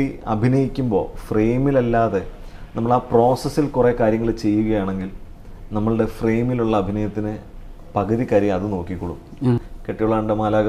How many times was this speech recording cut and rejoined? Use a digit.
1